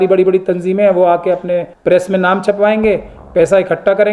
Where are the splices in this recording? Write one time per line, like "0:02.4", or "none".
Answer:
0:01.7